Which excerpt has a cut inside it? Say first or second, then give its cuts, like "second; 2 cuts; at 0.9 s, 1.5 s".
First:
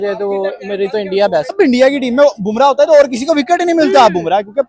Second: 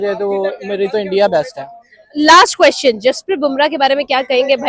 first; 1 cut; at 1.5 s